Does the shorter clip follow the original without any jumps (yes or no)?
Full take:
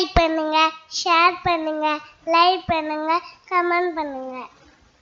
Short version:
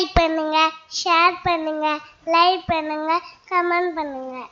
yes